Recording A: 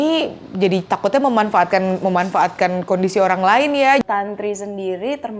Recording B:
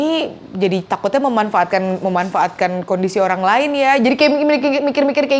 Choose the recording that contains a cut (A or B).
A